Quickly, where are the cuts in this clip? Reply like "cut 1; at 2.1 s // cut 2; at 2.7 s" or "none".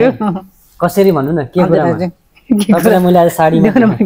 none